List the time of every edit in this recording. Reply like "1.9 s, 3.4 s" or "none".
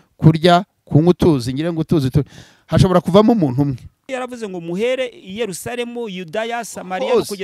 4.0 s